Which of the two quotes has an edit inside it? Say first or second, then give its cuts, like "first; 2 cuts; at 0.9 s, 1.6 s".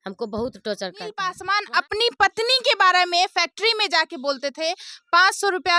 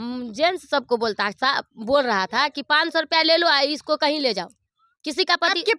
first; 1 cut; at 1.3 s